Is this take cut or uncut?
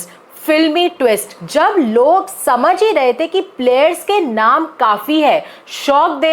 cut